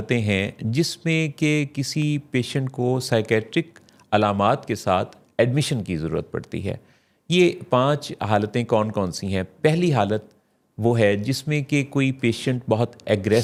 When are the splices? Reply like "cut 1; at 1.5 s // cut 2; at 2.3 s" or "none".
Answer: none